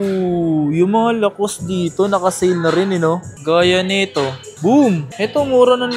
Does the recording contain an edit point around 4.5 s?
yes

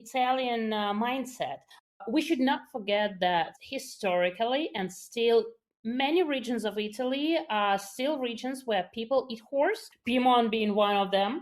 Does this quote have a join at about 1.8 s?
yes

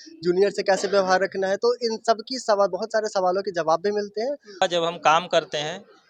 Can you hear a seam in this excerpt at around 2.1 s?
no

